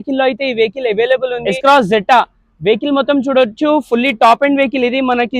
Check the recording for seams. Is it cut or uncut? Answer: uncut